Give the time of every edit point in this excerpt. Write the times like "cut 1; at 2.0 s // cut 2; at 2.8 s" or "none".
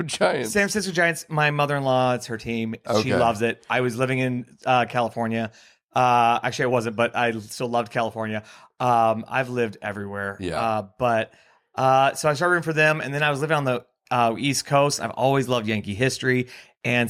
none